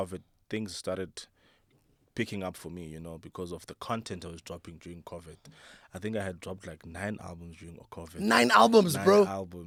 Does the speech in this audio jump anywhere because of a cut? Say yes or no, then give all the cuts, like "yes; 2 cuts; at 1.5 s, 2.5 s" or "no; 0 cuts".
no; 0 cuts